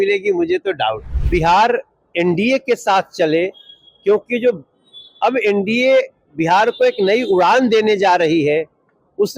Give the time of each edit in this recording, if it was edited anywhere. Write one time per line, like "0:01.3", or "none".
0:01.1